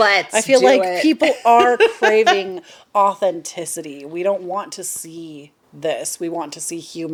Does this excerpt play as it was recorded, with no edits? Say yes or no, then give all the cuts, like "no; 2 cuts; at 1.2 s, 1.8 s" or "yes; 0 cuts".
yes; 0 cuts